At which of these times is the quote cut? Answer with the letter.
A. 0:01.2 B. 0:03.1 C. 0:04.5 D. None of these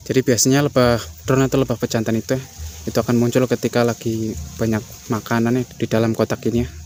D